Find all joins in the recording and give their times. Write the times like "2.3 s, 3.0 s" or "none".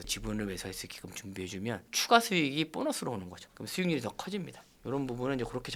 none